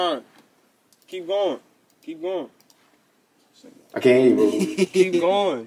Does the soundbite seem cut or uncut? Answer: uncut